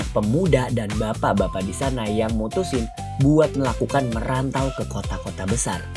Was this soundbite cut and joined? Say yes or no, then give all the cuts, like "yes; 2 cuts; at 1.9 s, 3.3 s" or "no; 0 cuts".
no; 0 cuts